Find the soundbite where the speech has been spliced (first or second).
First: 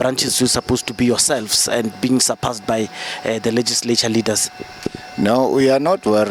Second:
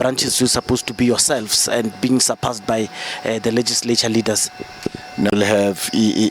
second